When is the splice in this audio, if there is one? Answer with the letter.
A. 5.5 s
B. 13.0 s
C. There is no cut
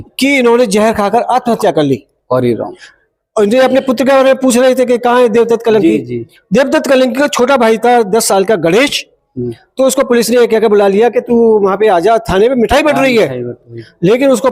C